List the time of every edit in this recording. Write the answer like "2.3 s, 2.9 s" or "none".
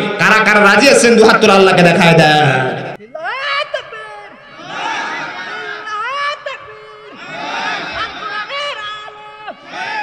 3.0 s